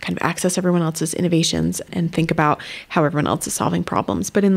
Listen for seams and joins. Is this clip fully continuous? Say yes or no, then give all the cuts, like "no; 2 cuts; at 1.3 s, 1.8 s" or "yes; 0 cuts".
no; 1 cut; at 1.9 s